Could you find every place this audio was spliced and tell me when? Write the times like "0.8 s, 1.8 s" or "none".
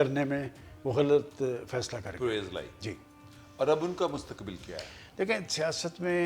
none